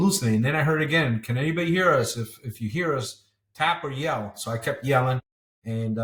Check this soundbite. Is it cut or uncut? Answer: uncut